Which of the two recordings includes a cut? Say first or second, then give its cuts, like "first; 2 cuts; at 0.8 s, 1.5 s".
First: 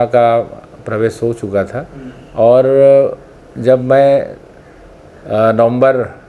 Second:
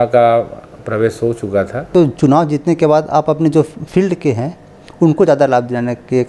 second; 1 cut; at 1.9 s